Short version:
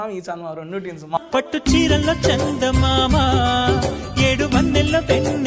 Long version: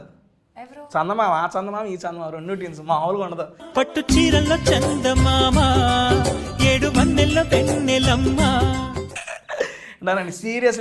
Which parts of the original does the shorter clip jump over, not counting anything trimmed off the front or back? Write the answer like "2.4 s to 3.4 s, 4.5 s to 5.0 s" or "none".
2.9 s to 3.6 s

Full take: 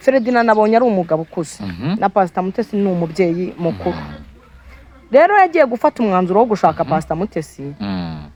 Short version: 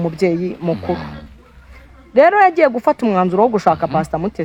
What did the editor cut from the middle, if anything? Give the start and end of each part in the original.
none

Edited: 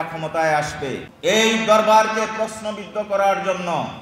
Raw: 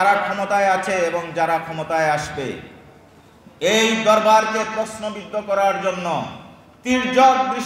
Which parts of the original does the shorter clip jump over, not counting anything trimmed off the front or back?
2.6 s to 3.4 s

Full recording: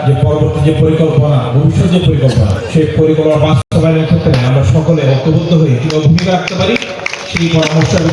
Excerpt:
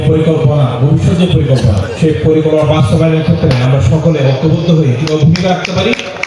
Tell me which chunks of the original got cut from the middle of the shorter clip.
3.6 s to 3.7 s

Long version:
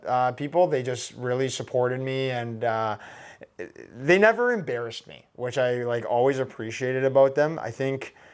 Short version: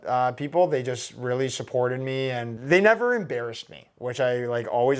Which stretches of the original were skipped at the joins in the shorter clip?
2.5 s to 3.9 s

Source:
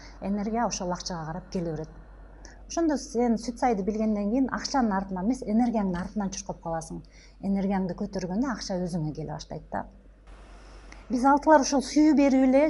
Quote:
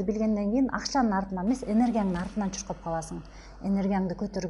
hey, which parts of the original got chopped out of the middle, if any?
none

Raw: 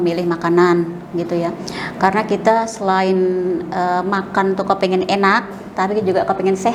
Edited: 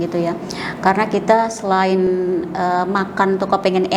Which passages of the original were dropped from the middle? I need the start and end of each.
none

